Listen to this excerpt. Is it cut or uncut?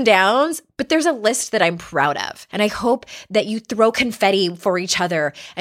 cut